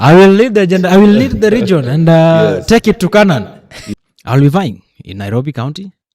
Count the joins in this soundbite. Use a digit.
1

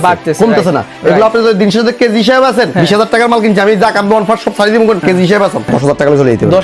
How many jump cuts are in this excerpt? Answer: 2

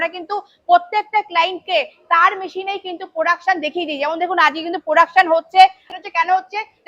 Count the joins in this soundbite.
1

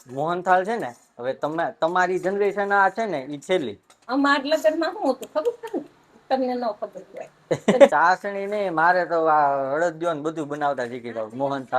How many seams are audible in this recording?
2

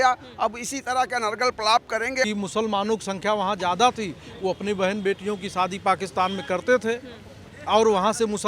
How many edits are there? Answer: 1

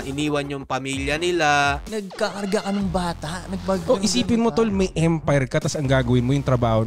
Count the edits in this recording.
1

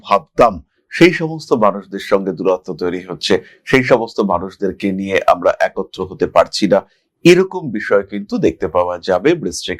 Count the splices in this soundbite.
0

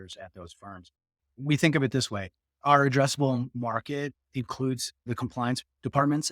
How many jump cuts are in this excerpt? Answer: 1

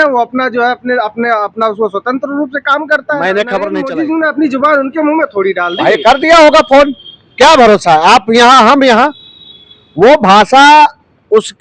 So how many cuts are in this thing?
1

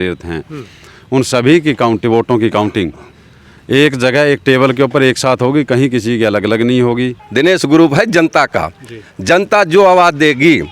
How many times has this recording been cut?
1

